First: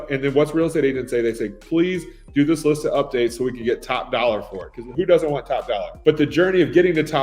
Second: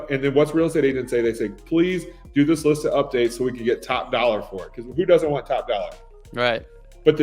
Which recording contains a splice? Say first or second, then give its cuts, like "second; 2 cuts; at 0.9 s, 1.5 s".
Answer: first; 1 cut; at 5.9 s